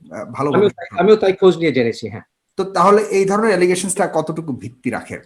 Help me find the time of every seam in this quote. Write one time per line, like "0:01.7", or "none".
none